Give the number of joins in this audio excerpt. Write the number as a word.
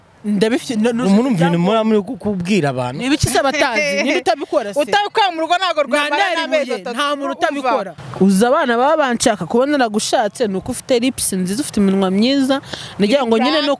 one